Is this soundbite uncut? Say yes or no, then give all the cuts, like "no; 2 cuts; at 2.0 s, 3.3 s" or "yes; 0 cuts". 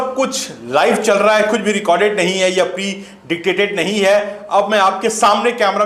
yes; 0 cuts